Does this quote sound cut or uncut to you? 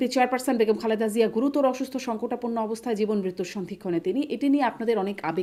uncut